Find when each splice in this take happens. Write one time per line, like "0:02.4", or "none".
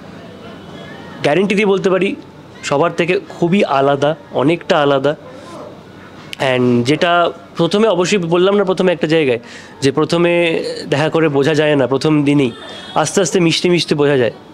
none